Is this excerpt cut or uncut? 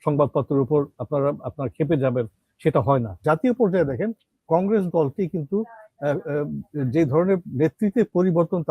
cut